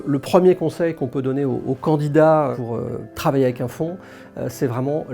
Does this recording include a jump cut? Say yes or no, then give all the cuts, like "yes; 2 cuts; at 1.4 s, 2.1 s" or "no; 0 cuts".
yes; 1 cut; at 2.6 s